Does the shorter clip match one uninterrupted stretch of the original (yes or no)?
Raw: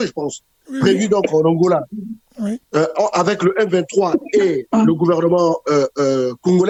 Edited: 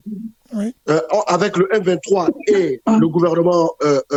yes